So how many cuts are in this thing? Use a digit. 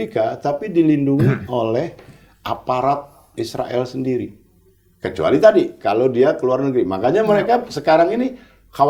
0